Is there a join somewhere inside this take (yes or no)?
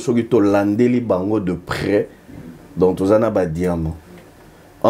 no